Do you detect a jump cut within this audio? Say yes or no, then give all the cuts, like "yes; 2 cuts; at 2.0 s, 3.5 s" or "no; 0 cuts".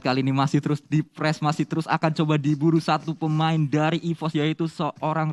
no; 0 cuts